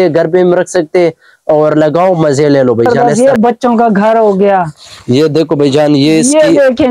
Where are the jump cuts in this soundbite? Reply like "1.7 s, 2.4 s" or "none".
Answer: 2.9 s